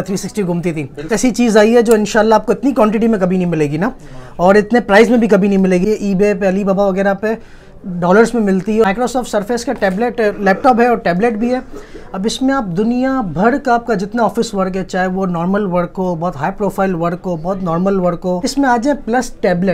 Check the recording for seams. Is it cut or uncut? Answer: cut